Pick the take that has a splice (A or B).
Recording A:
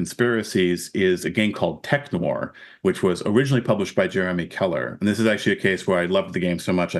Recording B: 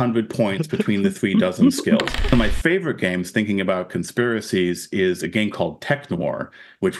B